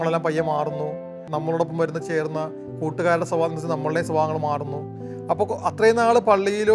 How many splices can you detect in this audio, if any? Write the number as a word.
one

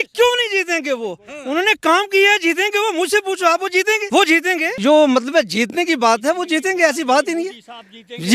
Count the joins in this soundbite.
two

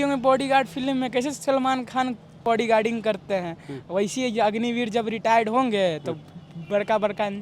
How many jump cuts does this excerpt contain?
one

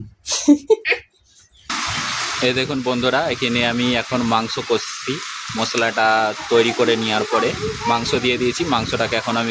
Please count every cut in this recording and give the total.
one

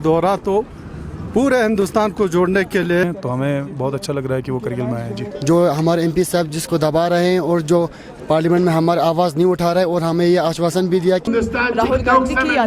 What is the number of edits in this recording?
three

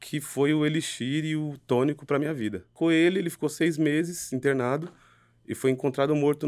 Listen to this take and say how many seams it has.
one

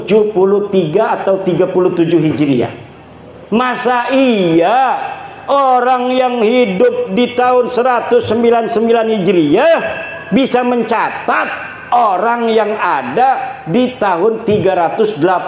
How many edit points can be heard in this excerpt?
one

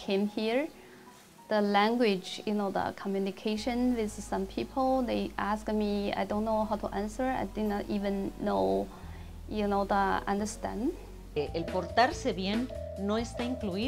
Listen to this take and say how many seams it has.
one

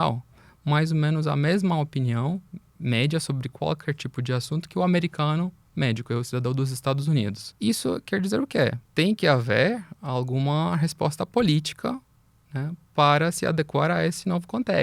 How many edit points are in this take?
two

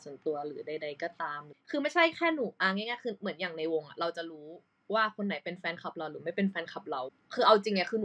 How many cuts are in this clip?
two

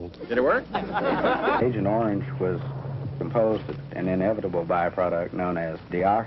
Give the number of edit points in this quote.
one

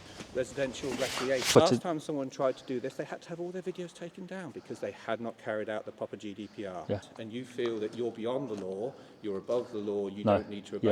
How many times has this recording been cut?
two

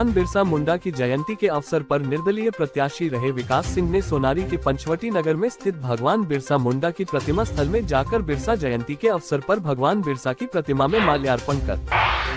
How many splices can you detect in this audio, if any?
zero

